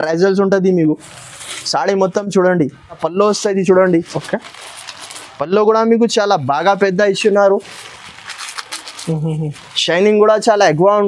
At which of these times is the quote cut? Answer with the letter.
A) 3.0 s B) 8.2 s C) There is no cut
A